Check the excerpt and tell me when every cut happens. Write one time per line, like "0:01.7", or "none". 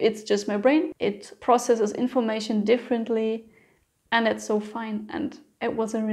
0:00.9